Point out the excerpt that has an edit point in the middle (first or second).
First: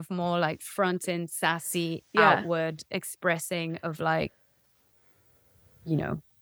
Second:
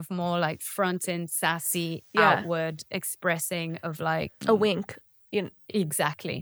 second